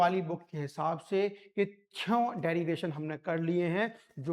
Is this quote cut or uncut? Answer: uncut